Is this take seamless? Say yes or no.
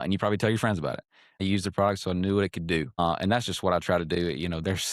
no